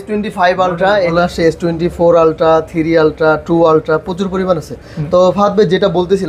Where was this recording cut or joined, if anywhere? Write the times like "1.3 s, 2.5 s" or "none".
1.1 s

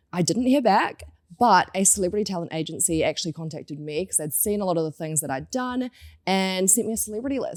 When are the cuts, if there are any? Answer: none

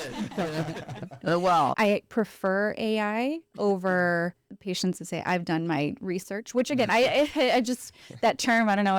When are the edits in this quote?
1.7 s, 4.5 s

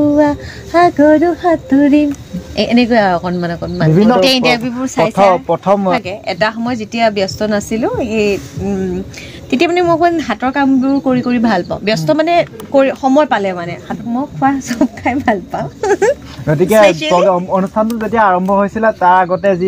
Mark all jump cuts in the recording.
4.2 s, 5.9 s, 13.8 s

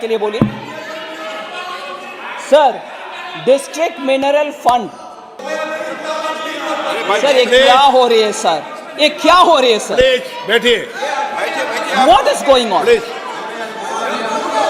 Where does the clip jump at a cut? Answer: 5.3 s

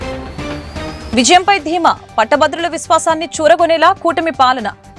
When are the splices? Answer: 1.0 s

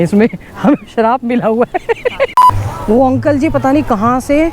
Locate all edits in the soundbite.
2.6 s

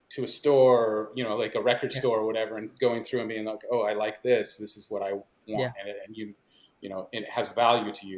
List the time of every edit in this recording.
none

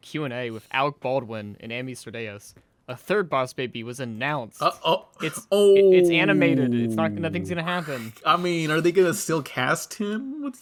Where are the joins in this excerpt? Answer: none

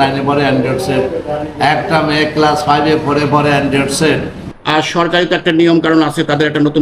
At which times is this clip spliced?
4.5 s

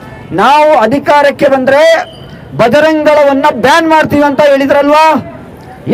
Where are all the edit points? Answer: none

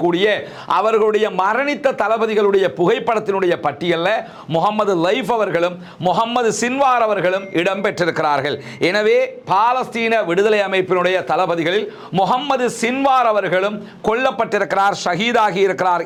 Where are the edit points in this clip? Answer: none

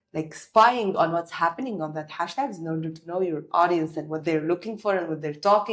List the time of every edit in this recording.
none

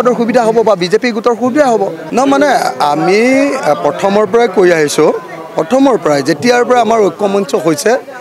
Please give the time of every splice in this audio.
2.0 s

